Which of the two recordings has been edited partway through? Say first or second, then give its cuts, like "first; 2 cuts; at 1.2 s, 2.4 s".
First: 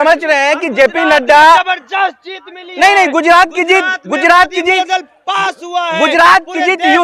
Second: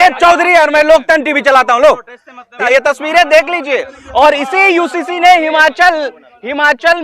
second; 1 cut; at 2.6 s